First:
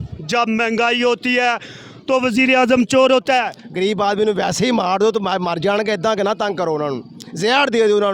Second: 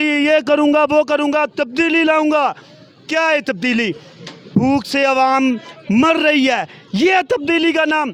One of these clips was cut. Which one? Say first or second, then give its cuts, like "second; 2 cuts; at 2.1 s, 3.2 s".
first; 1 cut; at 3.5 s